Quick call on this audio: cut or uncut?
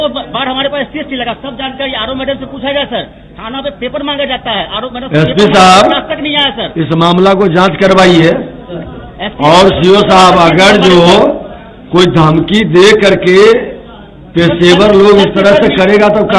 uncut